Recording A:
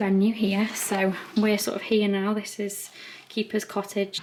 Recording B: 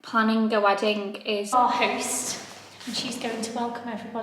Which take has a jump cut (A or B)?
B